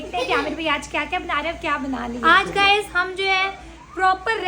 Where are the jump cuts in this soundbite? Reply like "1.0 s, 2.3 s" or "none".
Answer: 2.2 s